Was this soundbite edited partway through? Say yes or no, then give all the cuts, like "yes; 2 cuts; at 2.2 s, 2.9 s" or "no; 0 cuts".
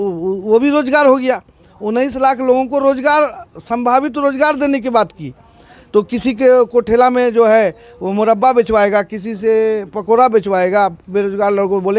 no; 0 cuts